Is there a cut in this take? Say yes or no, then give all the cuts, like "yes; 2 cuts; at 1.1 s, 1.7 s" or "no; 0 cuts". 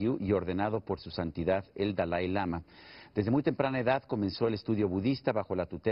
yes; 1 cut; at 2.7 s